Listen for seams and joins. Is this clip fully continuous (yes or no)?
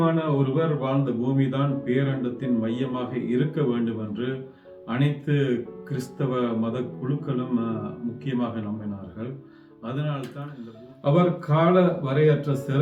no